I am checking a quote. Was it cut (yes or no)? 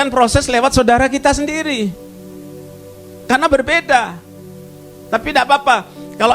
no